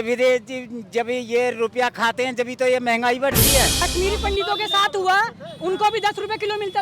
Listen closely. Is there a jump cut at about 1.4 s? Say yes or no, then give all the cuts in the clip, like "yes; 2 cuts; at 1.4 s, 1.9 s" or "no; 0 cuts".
no; 1 cut; at 3.8 s